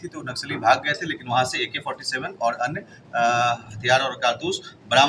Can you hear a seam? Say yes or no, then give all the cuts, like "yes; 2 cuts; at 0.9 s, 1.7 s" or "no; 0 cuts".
no; 0 cuts